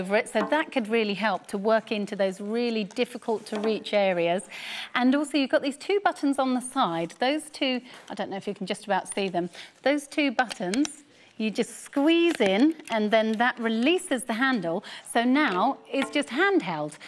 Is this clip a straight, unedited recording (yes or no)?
yes